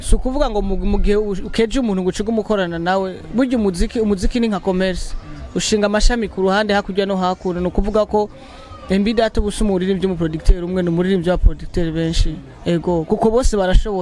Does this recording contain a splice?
no; 0 cuts

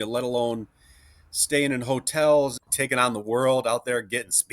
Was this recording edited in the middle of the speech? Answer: yes; 1 cut; at 2.6 s

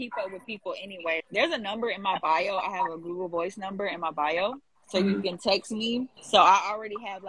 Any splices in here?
yes; 1 cut; at 1.2 s

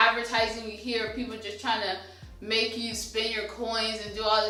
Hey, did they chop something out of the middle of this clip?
no; 0 cuts

